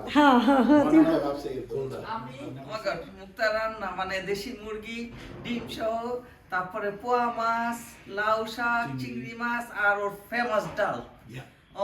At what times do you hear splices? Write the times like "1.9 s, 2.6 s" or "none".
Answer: 2.3 s